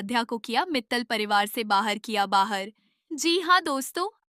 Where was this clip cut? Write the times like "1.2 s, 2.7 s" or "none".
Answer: none